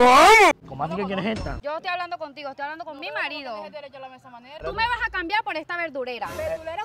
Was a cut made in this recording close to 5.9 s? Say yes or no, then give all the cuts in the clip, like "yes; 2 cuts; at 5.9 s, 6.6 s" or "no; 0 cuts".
no; 2 cuts; at 1.5 s, 4.6 s